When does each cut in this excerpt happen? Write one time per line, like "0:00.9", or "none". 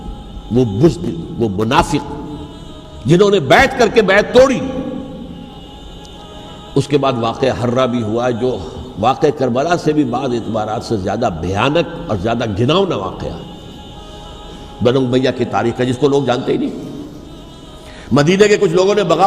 0:05.6

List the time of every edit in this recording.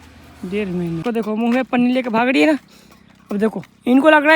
0:01.0

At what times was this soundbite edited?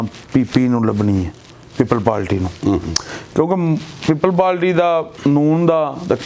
none

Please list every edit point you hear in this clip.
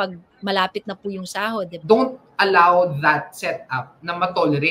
0:01.8

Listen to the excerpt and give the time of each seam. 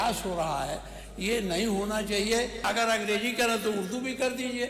0:02.6

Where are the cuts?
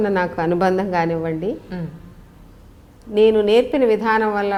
none

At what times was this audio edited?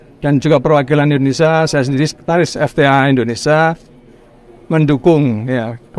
none

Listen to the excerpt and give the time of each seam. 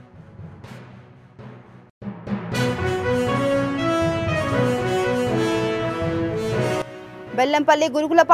0:06.8

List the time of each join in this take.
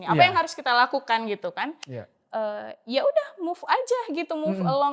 none

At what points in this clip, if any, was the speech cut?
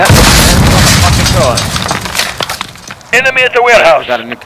0:03.1

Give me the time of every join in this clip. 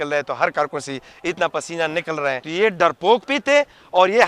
0:02.4

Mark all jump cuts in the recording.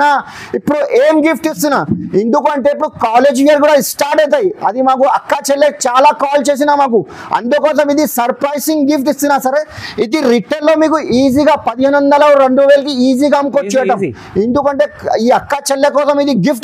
none

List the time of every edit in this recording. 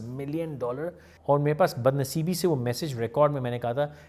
0:01.1

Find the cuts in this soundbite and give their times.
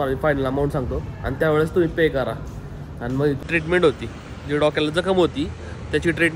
0:03.4

